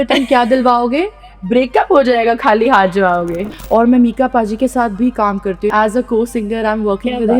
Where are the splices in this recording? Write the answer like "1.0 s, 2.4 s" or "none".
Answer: 3.4 s, 5.7 s